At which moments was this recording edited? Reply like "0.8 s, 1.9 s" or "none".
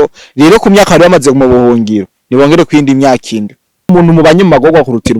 3.9 s

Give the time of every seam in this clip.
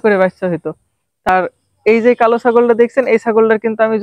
1.3 s

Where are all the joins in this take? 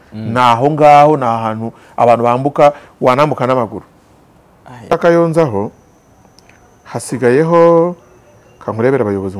5.0 s

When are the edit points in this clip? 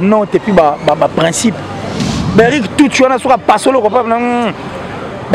2.0 s

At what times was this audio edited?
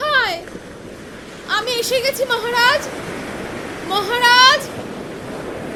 none

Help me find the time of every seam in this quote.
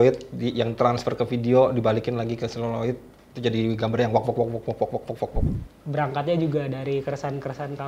5.5 s

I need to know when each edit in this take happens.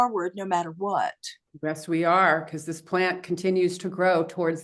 none

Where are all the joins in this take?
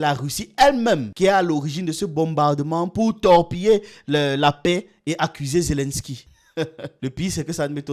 none

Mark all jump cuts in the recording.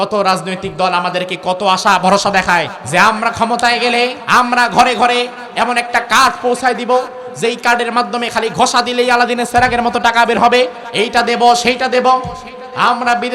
2.8 s, 4.2 s, 10.8 s

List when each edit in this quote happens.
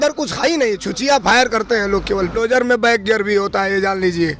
2.4 s

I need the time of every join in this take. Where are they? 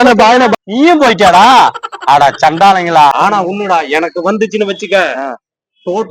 3.1 s

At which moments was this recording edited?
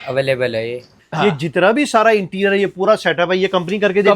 1.0 s

